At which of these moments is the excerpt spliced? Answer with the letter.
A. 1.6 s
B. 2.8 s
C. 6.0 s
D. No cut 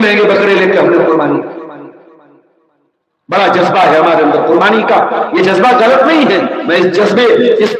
D